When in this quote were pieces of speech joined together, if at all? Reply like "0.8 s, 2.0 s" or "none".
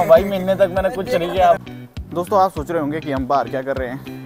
1.6 s